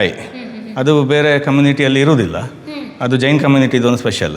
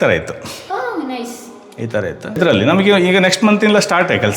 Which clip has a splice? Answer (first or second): second